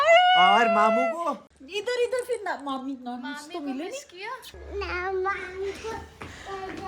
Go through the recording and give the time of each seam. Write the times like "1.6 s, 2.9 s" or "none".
1.5 s, 4.5 s